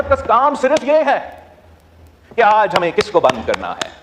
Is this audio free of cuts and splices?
yes; 0 cuts

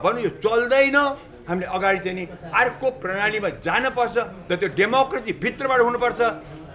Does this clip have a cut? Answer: no; 0 cuts

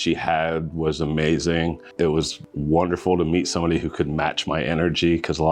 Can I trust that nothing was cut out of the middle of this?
no; 1 cut; at 2.1 s

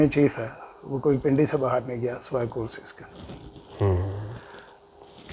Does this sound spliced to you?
no; 0 cuts

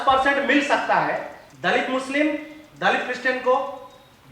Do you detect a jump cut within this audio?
yes; 1 cut; at 1.4 s

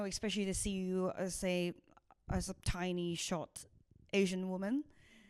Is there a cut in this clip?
no; 0 cuts

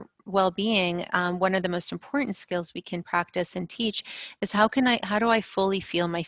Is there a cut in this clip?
no; 0 cuts

